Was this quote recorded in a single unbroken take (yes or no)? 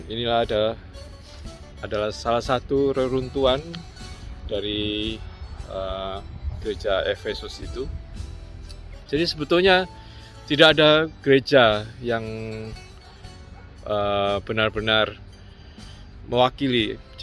yes